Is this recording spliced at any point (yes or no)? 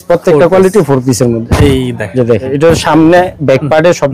yes